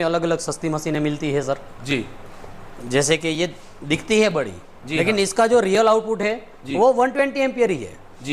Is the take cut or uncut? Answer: uncut